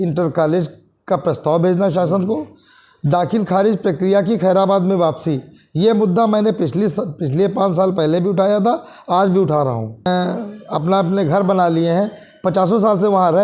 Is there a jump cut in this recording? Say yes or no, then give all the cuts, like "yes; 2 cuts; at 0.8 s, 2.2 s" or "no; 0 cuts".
yes; 1 cut; at 10.1 s